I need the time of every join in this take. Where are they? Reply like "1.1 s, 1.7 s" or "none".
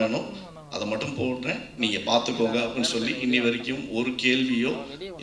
none